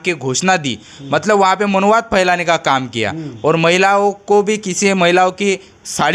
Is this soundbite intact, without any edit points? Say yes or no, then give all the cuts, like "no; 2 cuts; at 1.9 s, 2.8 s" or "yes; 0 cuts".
yes; 0 cuts